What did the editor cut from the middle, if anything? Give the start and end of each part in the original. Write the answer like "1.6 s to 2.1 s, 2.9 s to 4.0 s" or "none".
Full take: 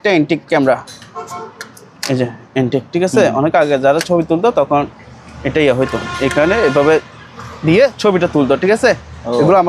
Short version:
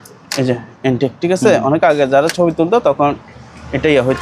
none

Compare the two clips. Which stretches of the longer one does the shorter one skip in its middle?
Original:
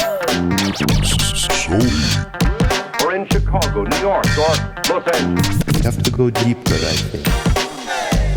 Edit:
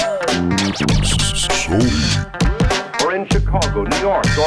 none

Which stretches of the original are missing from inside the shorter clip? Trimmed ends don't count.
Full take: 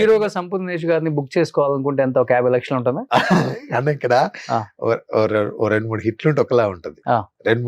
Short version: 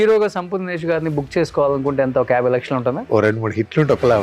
3.0 s to 5.5 s

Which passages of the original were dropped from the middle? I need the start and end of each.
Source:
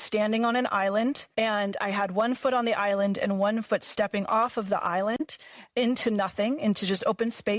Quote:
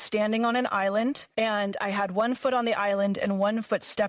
none

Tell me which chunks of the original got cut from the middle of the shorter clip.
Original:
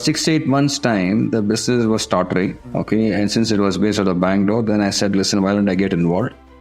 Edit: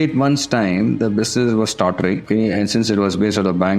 2.6 s to 2.9 s

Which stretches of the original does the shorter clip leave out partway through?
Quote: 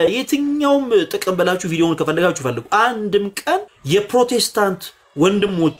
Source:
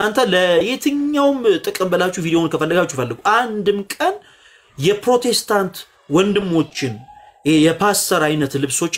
4.3 s to 4.7 s

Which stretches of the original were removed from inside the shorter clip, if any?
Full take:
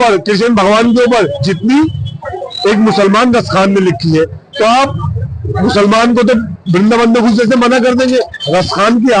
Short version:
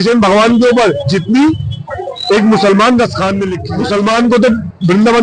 3.9 s to 5.4 s

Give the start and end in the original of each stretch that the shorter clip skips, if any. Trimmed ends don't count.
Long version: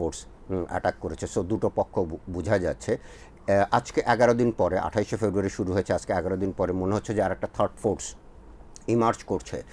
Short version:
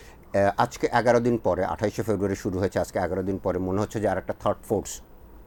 none

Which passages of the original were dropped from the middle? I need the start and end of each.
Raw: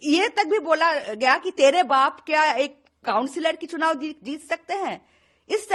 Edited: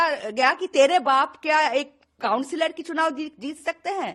none

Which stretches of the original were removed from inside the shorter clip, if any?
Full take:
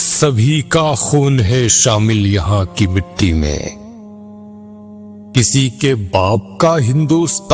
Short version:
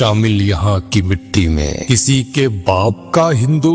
3.7 s to 5.3 s

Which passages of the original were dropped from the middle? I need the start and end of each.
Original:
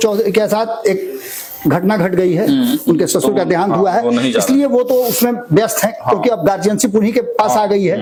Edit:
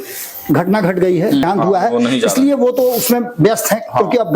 2.6 s to 3.5 s

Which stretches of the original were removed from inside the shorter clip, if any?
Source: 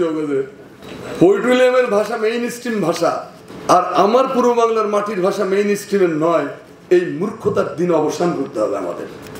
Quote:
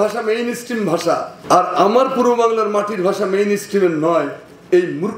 3.3 s to 3.5 s

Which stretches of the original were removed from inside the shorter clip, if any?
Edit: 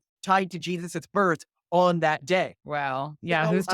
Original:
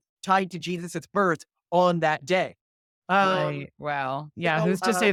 2.6 s to 3.8 s

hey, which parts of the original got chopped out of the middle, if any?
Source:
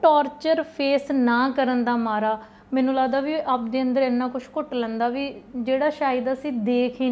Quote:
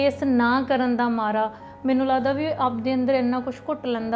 none

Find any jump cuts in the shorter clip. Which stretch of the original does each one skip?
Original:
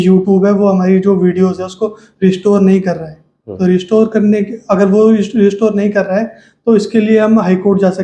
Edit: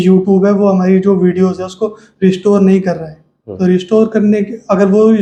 none

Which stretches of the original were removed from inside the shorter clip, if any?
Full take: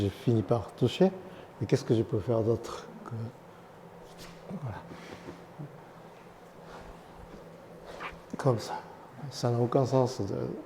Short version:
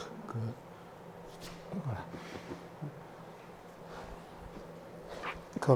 none

